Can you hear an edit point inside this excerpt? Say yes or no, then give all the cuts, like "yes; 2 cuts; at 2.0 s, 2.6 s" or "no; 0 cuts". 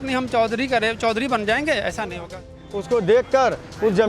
yes; 1 cut; at 2.5 s